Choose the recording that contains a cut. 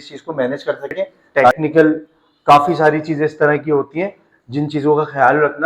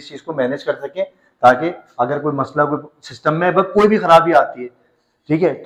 first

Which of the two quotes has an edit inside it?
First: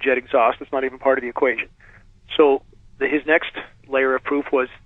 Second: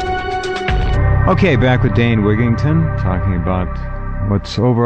second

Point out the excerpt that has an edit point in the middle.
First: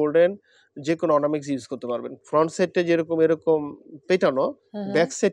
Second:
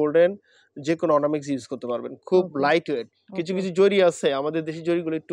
first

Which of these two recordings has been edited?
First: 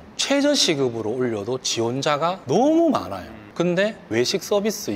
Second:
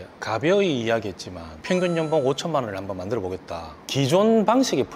second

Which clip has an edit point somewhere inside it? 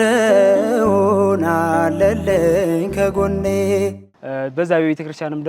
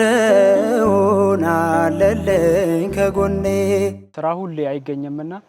second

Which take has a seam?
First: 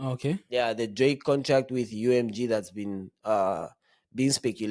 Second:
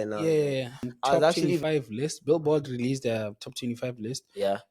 second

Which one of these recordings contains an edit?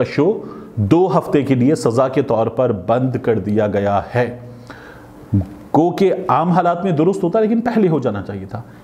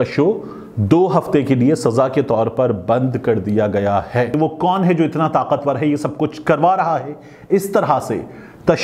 second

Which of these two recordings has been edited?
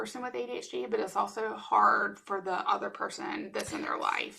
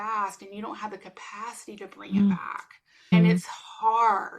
second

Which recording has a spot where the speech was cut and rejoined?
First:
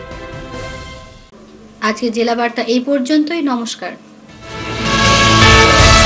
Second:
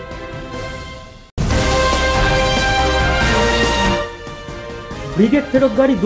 second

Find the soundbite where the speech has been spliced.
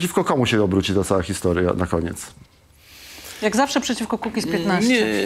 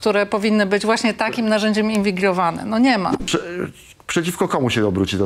second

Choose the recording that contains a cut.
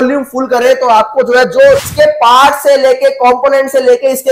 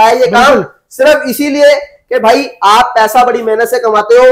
first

